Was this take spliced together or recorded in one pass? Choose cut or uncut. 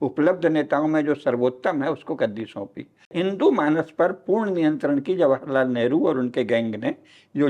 cut